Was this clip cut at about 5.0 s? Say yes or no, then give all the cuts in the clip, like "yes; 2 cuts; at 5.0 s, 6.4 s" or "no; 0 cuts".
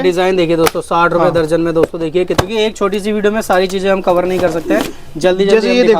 no; 1 cut; at 2.3 s